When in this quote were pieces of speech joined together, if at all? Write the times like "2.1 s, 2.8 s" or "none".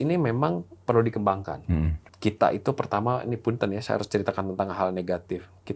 2.0 s